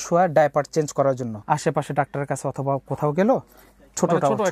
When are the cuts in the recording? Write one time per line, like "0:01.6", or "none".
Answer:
0:01.3